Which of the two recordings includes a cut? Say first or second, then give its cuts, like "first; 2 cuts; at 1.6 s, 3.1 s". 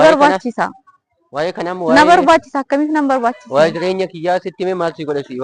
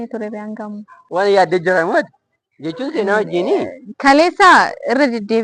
second; 1 cut; at 0.9 s